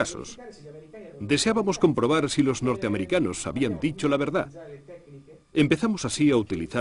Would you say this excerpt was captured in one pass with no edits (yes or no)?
yes